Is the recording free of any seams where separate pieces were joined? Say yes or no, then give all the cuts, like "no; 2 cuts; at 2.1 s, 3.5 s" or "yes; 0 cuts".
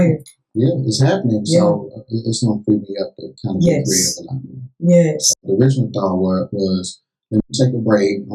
no; 1 cut; at 5.4 s